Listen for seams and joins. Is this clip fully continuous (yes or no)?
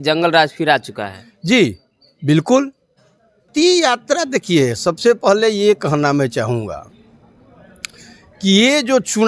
no